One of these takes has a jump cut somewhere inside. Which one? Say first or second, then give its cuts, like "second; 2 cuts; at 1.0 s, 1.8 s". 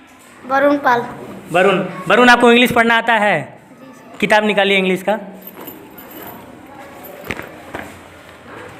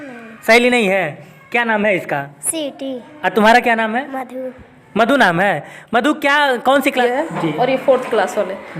second; 1 cut; at 7.0 s